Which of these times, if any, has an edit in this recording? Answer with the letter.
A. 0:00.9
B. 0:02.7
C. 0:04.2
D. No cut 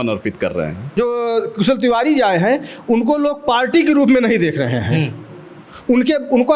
A